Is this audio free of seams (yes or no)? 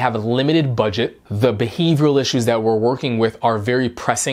no